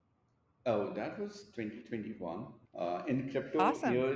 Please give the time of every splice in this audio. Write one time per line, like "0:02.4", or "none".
0:02.6